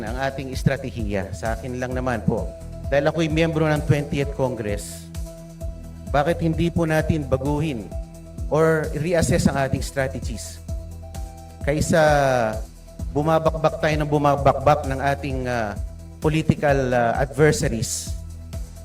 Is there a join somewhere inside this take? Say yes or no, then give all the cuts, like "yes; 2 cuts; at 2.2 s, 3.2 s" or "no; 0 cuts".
yes; 1 cut; at 17.9 s